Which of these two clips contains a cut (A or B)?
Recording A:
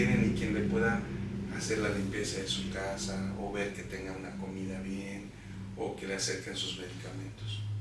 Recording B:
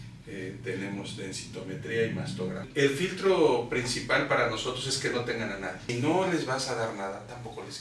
B